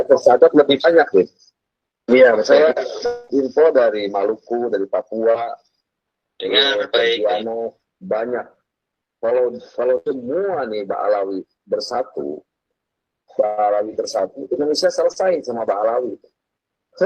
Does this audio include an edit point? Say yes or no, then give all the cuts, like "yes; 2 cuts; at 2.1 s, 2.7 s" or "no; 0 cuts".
no; 0 cuts